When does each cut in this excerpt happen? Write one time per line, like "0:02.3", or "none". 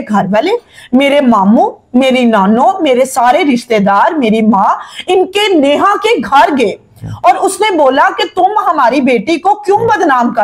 none